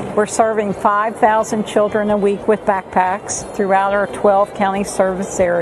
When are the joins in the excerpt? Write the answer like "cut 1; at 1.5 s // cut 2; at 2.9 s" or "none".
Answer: none